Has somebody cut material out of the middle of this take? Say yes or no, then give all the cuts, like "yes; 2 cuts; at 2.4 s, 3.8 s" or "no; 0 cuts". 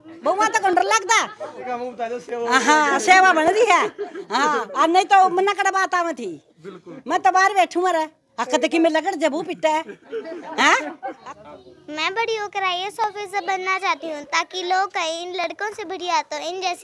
yes; 2 cuts; at 1.7 s, 11.3 s